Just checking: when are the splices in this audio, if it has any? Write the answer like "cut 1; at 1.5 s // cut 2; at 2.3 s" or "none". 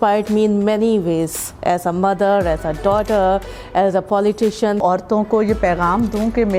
cut 1; at 4.8 s